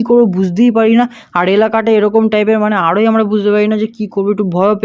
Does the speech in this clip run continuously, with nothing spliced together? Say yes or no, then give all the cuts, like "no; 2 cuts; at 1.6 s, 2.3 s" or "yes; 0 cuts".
yes; 0 cuts